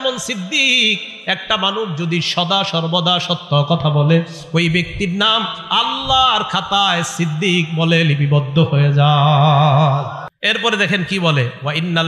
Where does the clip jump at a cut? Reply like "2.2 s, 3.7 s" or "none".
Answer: 10.3 s